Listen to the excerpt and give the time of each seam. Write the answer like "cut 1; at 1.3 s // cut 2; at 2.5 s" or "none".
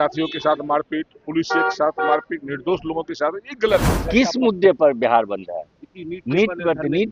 cut 1; at 3.9 s